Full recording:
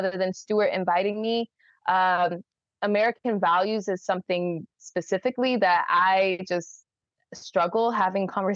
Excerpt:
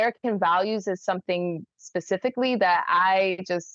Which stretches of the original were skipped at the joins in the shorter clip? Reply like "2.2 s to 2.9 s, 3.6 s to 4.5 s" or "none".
none